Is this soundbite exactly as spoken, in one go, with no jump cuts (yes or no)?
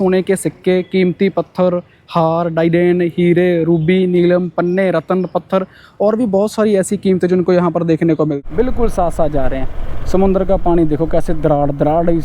no